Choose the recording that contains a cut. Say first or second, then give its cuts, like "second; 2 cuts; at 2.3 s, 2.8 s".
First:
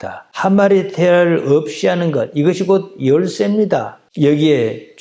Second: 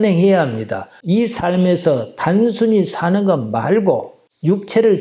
second; 1 cut; at 0.9 s